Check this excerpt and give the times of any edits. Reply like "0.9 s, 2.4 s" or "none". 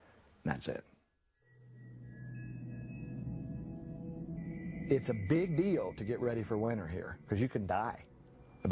5.5 s